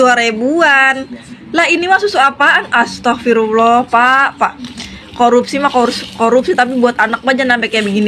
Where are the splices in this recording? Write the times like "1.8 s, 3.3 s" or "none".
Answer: none